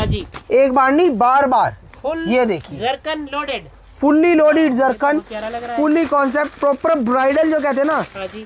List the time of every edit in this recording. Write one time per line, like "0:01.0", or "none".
none

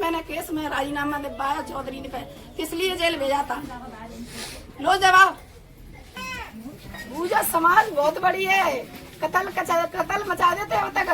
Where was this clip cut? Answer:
0:06.2

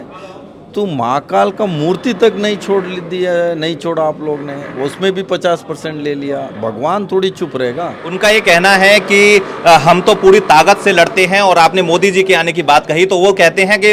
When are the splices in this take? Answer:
0:08.0

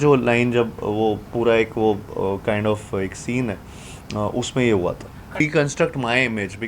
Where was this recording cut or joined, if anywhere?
0:05.4

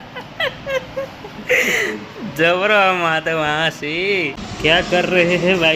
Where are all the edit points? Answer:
0:04.4

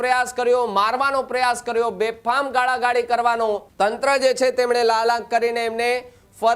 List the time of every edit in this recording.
0:03.7

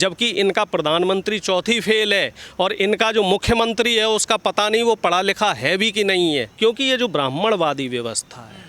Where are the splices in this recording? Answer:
0:06.5

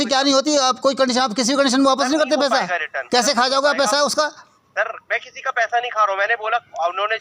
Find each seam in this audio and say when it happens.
none

